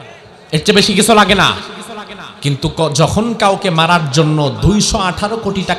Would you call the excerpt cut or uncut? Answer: uncut